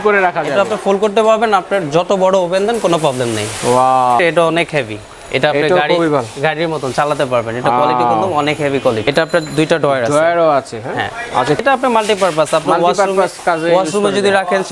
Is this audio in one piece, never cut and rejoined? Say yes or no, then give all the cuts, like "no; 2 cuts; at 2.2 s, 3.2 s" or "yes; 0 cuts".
no; 3 cuts; at 4.2 s, 9.0 s, 11.6 s